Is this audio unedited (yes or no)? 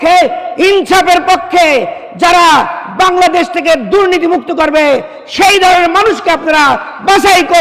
yes